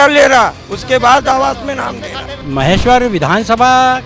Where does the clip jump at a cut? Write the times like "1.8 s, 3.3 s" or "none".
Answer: 2.4 s